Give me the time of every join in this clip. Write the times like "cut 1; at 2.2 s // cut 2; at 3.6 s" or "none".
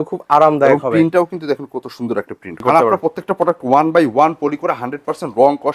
cut 1; at 2.6 s

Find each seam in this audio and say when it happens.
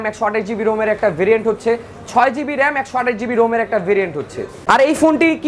cut 1; at 4.5 s

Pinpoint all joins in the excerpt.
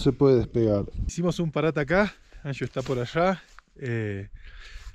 cut 1; at 1.0 s

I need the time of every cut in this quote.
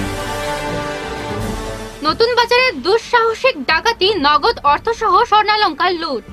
cut 1; at 1.4 s

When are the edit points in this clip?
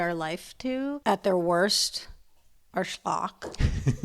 cut 1; at 1.0 s

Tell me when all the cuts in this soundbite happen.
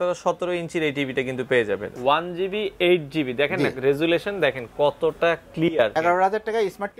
cut 1; at 1.9 s // cut 2; at 5.9 s

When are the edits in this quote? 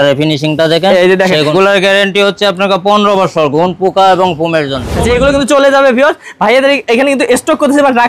cut 1; at 1.5 s // cut 2; at 4.9 s

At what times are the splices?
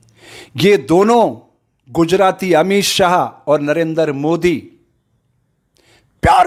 none

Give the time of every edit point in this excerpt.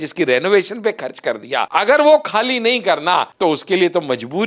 cut 1; at 1.7 s // cut 2; at 3.3 s

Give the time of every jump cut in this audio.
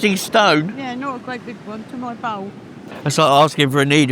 cut 1; at 2.9 s

